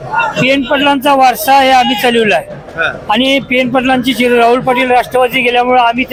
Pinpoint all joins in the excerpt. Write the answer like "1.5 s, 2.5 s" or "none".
none